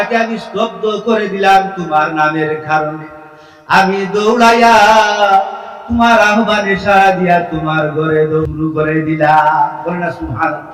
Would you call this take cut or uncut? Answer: cut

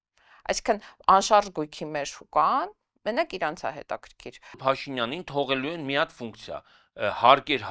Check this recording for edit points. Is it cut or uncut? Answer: cut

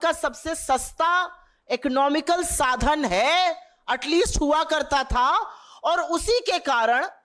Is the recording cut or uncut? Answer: uncut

